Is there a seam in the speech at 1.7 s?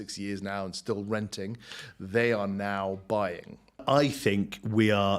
no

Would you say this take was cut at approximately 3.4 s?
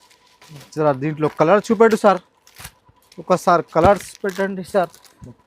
yes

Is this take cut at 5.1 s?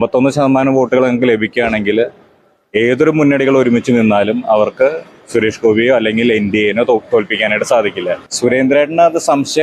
no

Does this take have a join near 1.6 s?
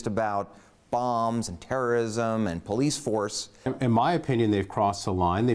no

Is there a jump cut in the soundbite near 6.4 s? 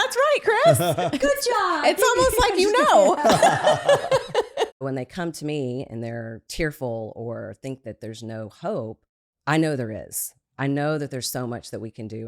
yes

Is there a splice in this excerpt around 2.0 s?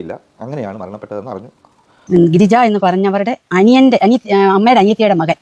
yes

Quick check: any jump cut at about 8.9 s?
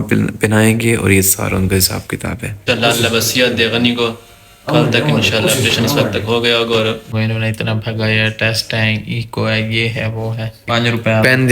no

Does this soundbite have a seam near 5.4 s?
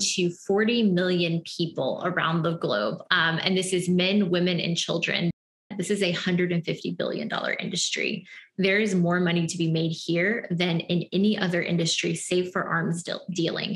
yes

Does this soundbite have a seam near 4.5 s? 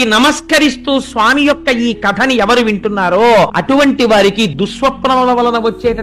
yes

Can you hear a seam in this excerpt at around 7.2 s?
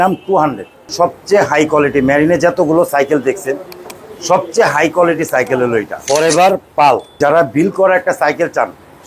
yes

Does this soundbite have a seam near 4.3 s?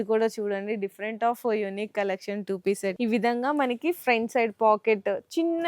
no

